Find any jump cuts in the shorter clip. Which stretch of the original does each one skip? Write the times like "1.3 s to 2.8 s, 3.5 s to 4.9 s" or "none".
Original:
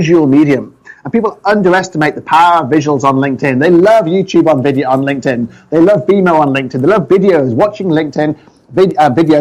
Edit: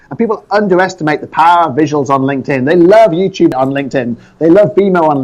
4.4 s to 4.8 s